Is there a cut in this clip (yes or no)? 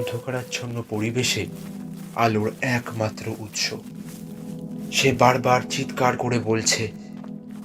yes